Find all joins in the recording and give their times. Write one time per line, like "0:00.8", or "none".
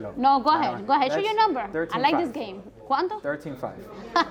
none